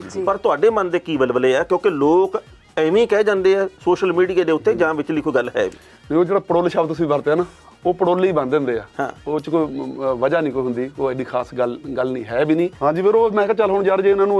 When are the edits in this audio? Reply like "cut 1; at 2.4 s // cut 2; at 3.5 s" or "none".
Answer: cut 1; at 12.7 s